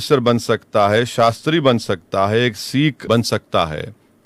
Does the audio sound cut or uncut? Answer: cut